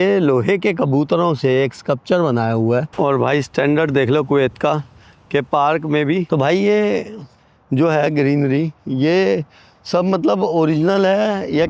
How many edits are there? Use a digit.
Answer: 2